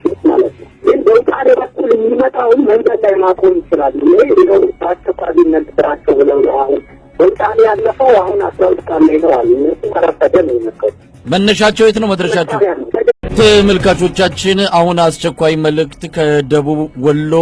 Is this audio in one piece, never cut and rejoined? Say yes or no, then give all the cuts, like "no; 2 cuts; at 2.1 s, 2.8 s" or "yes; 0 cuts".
yes; 0 cuts